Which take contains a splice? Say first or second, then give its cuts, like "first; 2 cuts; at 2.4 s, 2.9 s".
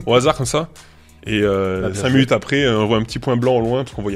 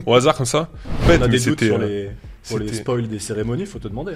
second; 1 cut; at 1.0 s